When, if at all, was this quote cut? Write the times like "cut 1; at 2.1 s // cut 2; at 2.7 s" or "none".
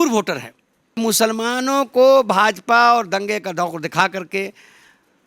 cut 1; at 1.0 s